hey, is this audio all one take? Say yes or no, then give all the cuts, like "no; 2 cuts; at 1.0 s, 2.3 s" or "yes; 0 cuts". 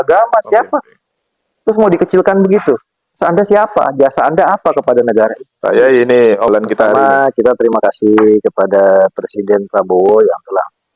no; 1 cut; at 6.5 s